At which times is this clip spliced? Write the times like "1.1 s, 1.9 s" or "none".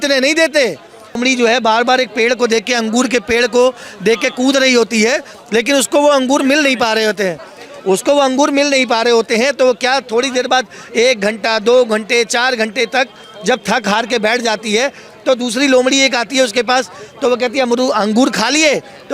1.2 s